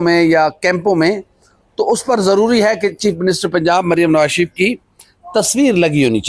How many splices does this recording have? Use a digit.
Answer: 0